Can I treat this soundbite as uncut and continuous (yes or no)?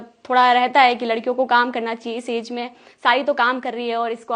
yes